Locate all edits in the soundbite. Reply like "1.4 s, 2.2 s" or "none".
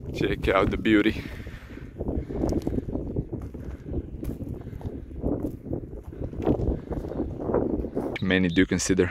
8.1 s